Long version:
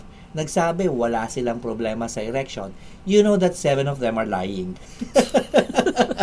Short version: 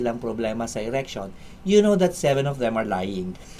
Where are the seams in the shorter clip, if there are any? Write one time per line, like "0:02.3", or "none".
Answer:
none

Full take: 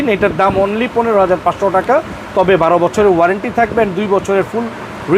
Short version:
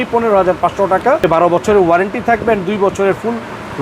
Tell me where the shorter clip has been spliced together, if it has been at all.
0:01.2

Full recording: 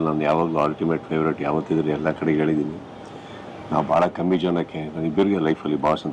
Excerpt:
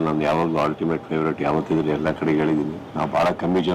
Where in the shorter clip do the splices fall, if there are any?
0:02.8

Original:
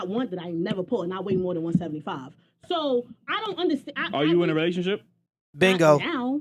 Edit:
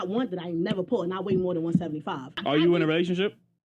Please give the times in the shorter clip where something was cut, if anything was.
0:02.3

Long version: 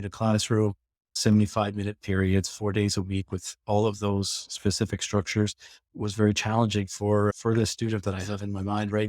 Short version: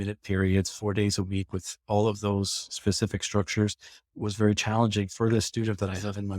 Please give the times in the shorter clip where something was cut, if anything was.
0:05.1

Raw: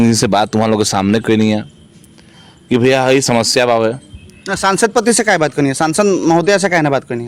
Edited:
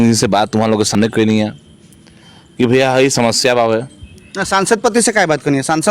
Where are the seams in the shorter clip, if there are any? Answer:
0:00.9

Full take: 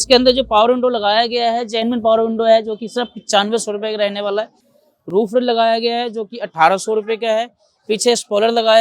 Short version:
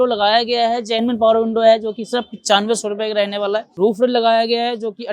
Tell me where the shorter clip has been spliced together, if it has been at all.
0:03.7

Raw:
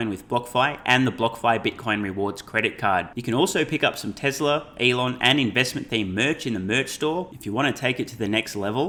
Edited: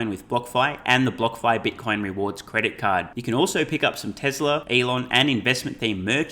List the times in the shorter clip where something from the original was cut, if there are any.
0:04.7

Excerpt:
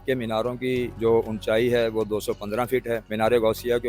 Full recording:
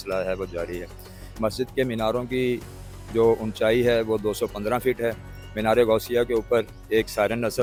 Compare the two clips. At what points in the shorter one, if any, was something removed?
0:00.9
0:03.1

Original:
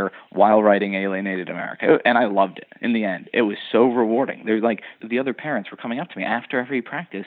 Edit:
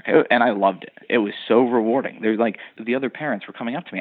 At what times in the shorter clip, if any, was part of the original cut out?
0:01.0

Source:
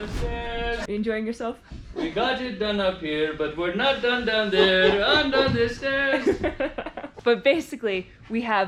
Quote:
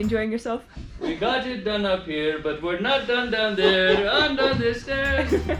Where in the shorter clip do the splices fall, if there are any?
none

